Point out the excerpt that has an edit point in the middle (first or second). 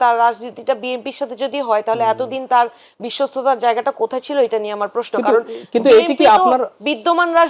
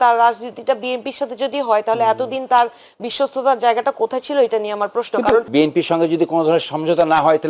second